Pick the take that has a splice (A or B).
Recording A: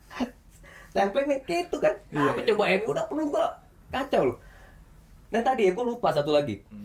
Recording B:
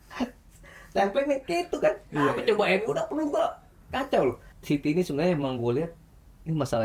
B